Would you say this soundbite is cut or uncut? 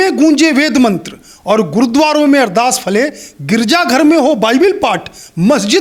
uncut